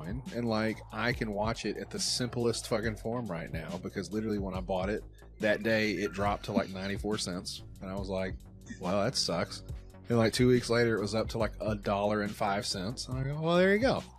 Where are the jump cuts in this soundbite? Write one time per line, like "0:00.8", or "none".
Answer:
none